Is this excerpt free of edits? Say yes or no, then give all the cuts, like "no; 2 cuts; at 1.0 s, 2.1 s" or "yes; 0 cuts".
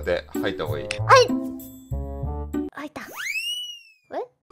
yes; 0 cuts